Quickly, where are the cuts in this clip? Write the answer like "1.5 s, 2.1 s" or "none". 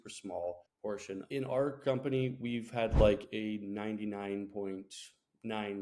1.0 s